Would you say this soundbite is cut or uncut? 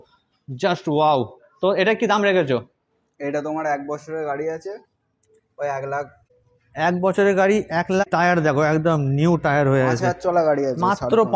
cut